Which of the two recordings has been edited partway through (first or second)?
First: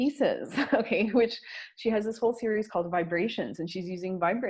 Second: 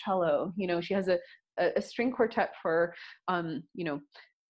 second